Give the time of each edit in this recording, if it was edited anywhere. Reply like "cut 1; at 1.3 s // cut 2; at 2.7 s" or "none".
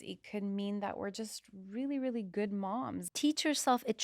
cut 1; at 3.0 s